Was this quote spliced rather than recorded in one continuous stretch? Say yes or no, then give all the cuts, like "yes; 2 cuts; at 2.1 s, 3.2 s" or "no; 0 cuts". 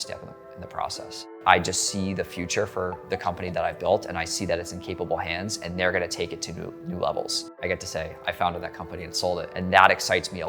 yes; 3 cuts; at 1.3 s, 7.4 s, 9.5 s